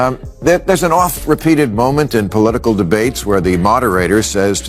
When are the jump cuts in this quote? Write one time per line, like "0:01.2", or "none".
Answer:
none